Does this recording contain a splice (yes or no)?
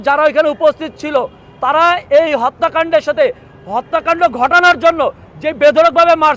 no